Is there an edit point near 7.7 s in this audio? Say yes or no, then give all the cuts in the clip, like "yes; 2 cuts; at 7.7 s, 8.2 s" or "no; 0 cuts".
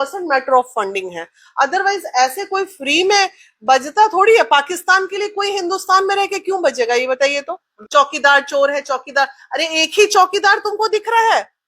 yes; 1 cut; at 7.7 s